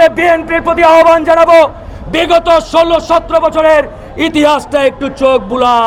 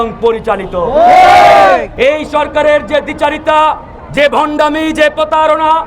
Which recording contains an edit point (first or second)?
second